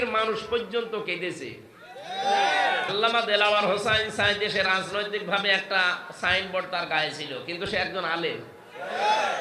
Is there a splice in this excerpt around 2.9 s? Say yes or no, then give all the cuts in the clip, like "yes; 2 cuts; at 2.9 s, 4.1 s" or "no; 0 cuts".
yes; 1 cut; at 2.9 s